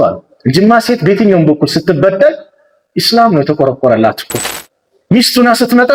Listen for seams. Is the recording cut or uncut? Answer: uncut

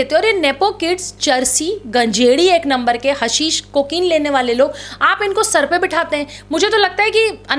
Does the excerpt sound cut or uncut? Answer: uncut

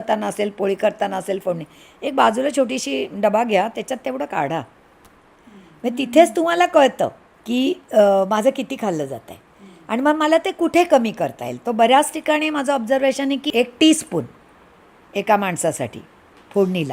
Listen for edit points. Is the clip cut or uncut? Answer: cut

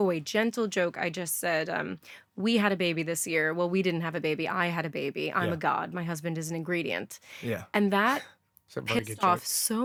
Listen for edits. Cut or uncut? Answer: uncut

